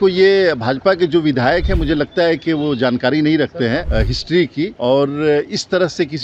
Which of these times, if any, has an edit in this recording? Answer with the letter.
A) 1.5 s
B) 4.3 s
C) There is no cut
B